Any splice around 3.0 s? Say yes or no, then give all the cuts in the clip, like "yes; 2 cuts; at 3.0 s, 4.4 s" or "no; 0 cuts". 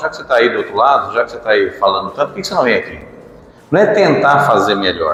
no; 0 cuts